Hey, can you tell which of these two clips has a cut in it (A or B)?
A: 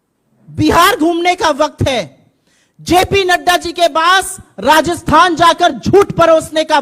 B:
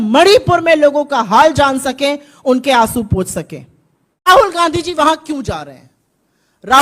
B